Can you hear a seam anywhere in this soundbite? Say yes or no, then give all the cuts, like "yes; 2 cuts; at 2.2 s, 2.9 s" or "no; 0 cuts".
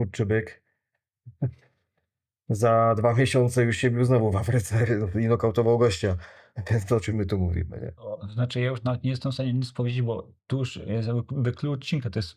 no; 0 cuts